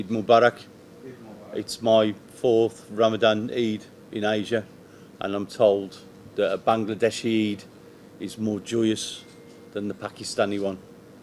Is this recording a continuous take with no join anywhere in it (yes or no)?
yes